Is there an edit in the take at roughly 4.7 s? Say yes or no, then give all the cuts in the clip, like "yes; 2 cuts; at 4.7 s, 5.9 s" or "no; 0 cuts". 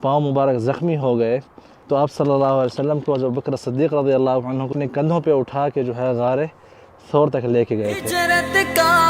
yes; 3 cuts; at 1.8 s, 4.7 s, 8.1 s